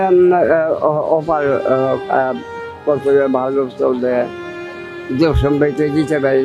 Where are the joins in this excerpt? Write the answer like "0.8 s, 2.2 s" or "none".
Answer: none